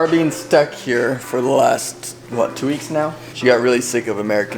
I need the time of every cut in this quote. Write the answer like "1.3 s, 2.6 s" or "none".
3.2 s